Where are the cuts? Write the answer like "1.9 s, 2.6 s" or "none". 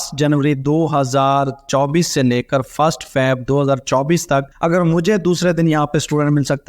4.5 s